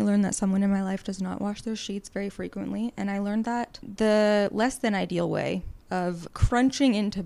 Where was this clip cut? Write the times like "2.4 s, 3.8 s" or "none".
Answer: 3.8 s, 6.0 s